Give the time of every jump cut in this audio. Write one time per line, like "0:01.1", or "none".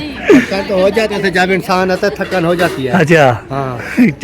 0:01.1